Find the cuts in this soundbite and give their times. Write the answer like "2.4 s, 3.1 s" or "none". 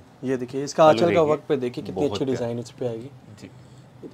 none